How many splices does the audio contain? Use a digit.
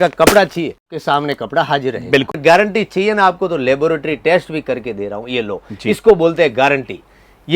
2